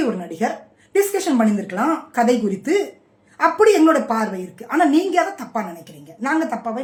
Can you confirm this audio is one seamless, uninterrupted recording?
yes; 0 cuts

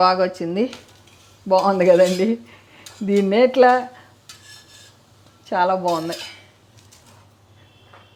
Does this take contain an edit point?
no; 0 cuts

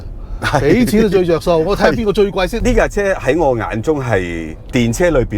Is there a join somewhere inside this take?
yes; 1 cut; at 2.6 s

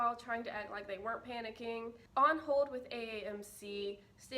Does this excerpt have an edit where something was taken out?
yes; 1 cut; at 2.0 s

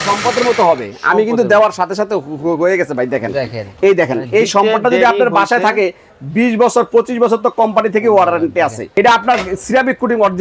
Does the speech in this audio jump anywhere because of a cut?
yes; 1 cut; at 8.9 s

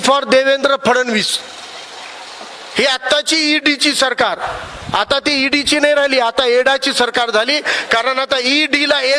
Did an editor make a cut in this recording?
no; 0 cuts

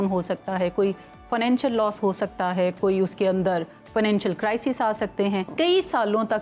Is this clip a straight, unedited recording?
no; 1 cut; at 5.5 s

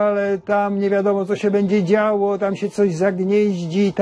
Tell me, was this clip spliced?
no; 0 cuts

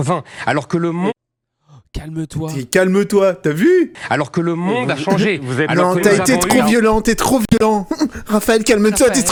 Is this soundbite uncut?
yes; 0 cuts

